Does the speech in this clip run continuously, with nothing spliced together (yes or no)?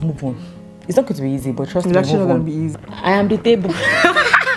no